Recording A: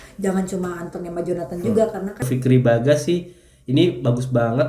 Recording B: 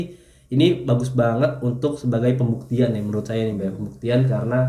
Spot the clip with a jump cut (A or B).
A